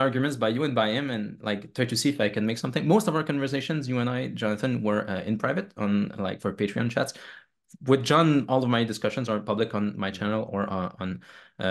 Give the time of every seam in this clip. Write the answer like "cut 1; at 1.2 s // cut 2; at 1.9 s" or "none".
none